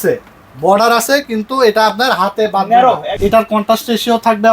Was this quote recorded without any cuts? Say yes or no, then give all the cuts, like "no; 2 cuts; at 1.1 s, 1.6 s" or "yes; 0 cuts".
no; 1 cut; at 3.1 s